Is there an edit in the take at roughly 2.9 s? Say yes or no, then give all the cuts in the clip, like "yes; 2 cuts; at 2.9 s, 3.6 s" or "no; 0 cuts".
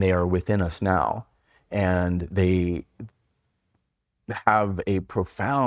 no; 0 cuts